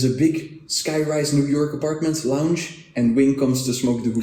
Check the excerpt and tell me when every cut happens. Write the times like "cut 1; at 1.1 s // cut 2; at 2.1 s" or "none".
none